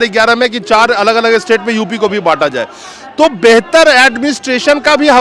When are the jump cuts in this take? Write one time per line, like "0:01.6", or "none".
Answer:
none